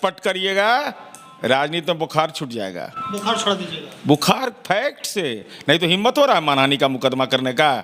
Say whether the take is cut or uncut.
uncut